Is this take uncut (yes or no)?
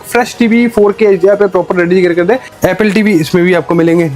no